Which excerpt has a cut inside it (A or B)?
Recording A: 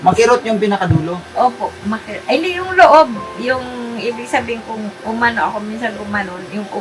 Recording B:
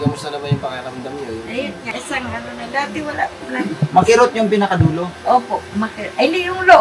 B